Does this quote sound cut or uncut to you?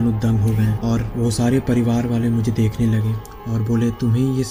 uncut